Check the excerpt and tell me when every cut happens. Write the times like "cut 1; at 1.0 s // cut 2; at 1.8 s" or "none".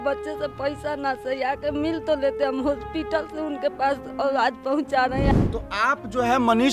cut 1; at 5.3 s